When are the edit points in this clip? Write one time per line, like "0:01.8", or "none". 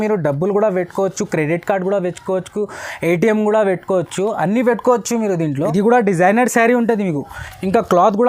0:05.5